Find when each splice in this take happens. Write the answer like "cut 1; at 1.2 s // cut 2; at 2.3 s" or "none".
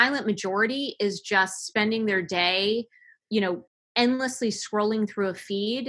cut 1; at 3.8 s

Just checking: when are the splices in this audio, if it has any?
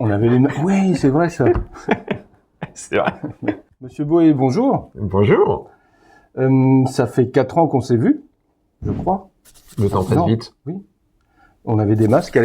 cut 1; at 3.9 s

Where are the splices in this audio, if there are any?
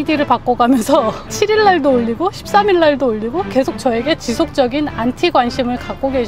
none

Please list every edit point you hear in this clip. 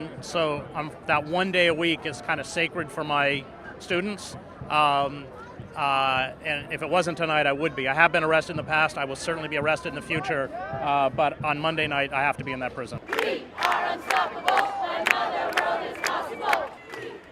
cut 1; at 14.3 s

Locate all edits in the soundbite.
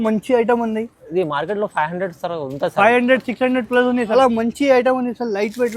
cut 1; at 4.2 s

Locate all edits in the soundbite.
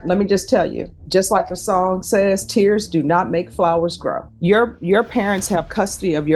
cut 1; at 0.9 s // cut 2; at 4.3 s

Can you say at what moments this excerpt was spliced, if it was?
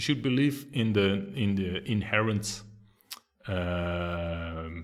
none

